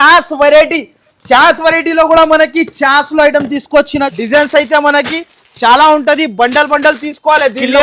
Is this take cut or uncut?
cut